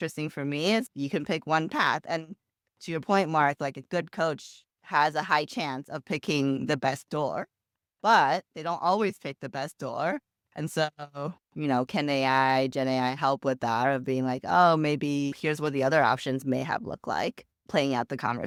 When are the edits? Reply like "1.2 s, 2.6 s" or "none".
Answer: none